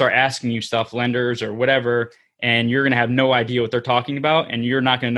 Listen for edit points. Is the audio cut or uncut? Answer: uncut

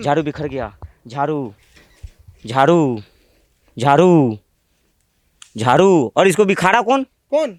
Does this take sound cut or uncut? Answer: uncut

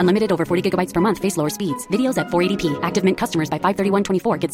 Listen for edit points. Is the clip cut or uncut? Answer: uncut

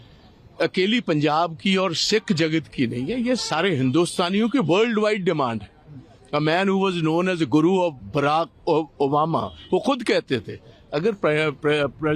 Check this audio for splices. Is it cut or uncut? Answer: uncut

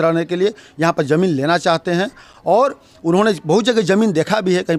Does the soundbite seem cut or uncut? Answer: uncut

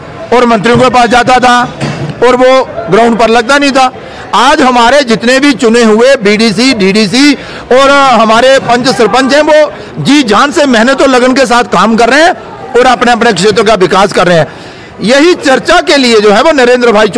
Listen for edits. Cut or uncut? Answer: uncut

